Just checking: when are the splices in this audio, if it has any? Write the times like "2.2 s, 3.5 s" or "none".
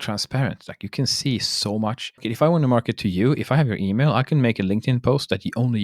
2.1 s